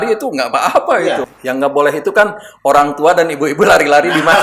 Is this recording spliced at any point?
yes; 1 cut; at 1.3 s

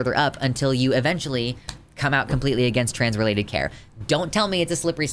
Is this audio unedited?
yes; 0 cuts

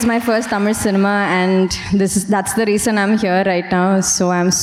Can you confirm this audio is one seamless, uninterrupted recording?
yes; 0 cuts

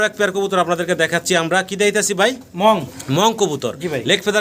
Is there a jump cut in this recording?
no; 0 cuts

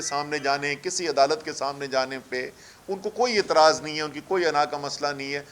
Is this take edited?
no; 0 cuts

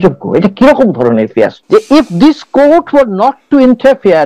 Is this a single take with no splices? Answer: no; 1 cut; at 1.6 s

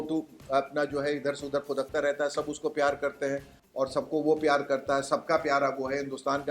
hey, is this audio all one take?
yes; 0 cuts

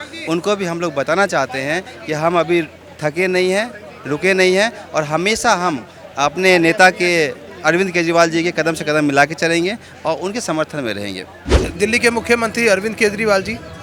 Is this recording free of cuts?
no; 1 cut; at 11.6 s

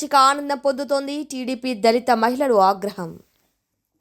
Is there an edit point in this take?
no; 0 cuts

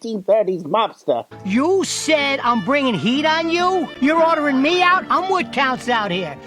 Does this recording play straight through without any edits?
no; 1 cut; at 1.3 s

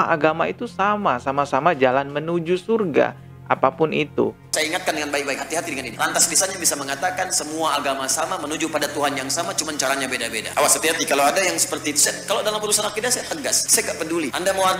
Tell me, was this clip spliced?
no; 0 cuts

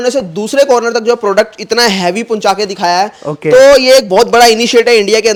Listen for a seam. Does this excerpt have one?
no; 0 cuts

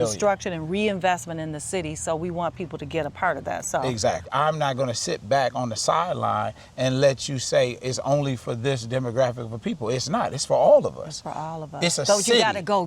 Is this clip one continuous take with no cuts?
no; 1 cut; at 4.2 s

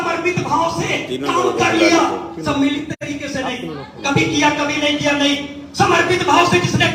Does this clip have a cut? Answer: no; 0 cuts

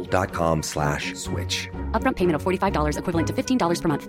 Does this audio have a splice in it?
no; 0 cuts

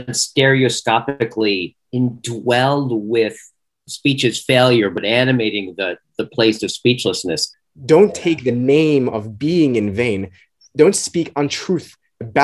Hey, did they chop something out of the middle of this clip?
yes; 4 cuts; at 3.8 s, 5.0 s, 7.4 s, 10.5 s

